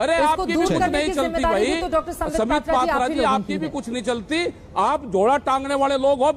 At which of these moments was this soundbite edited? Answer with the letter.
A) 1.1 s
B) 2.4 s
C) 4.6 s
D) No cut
D